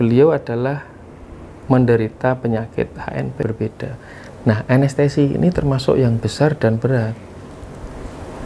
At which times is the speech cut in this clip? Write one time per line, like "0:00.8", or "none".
0:03.4